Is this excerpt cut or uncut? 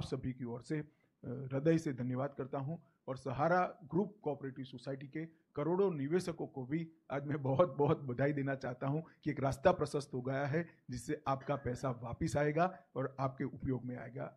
uncut